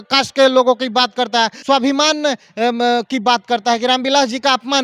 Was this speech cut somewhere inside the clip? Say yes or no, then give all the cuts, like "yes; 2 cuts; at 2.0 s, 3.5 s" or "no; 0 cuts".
yes; 1 cut; at 1.6 s